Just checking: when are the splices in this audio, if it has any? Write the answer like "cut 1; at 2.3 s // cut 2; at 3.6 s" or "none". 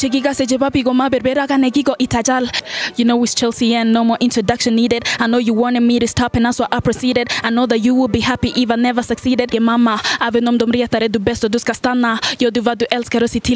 cut 1; at 2.6 s // cut 2; at 9.5 s

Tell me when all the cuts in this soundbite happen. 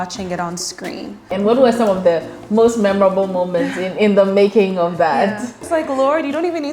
cut 1; at 1.3 s // cut 2; at 5.6 s

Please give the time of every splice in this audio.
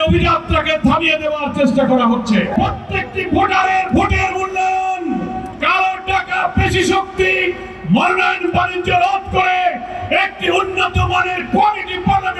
cut 1; at 2.6 s

